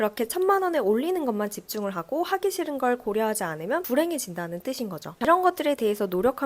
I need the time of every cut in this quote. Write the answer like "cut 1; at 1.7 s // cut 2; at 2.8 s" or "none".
cut 1; at 5.2 s